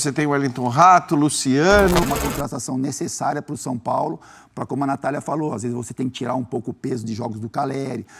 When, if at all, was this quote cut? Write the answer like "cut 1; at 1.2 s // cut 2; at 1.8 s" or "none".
cut 1; at 2.0 s

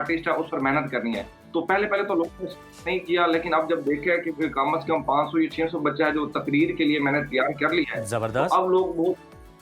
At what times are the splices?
none

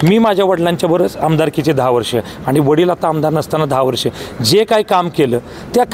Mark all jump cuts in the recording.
none

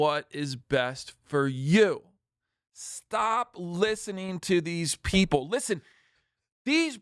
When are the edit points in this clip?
none

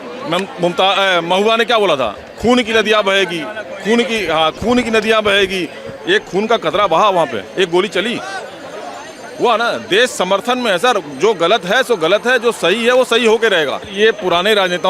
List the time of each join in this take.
cut 1; at 13.8 s

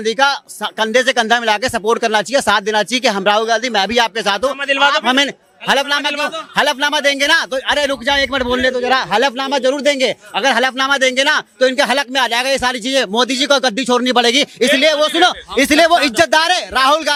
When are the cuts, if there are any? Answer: none

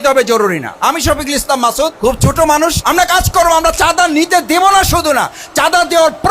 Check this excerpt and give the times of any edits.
cut 1; at 1.9 s // cut 2; at 2.8 s

